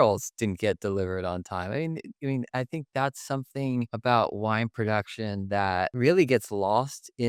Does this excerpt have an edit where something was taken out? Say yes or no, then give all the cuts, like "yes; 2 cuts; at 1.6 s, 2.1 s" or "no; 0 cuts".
no; 0 cuts